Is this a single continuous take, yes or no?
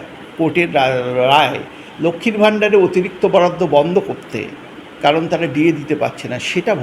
yes